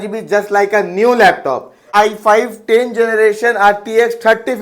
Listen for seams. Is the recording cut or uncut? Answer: cut